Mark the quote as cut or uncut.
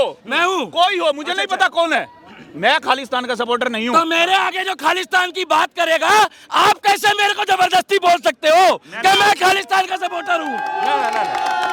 uncut